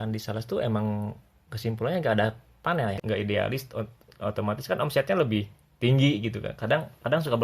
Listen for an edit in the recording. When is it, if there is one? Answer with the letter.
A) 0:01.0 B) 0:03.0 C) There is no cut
B